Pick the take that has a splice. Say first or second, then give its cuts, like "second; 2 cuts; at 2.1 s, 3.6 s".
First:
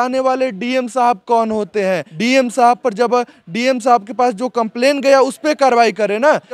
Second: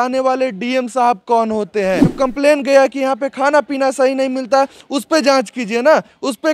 second; 1 cut; at 2.1 s